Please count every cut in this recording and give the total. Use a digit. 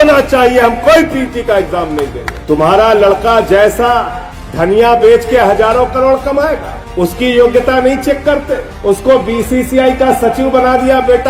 1